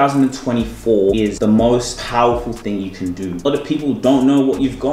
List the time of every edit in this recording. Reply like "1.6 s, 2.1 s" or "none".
1.3 s, 2.0 s, 3.5 s